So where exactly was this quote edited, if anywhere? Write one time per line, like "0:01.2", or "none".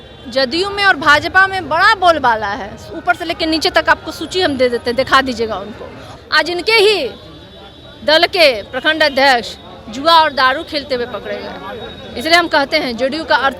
0:06.0